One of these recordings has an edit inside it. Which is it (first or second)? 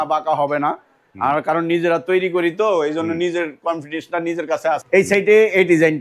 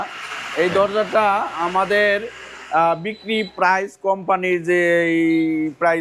first